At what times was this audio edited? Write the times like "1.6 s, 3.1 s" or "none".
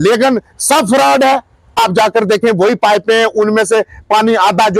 1.8 s